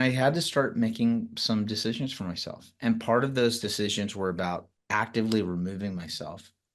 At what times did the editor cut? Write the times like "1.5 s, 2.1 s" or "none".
4.7 s

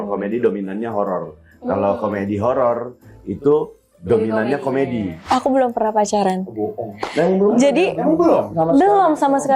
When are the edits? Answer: 5.2 s

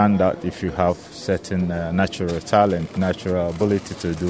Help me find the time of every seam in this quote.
none

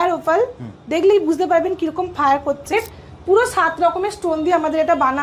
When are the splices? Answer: 2.7 s

